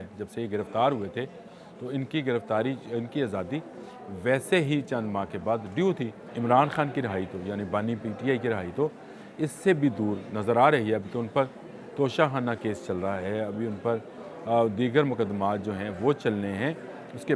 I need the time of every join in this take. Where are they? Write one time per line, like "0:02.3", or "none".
0:06.2